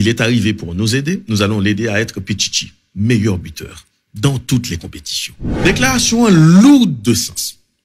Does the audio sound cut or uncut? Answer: cut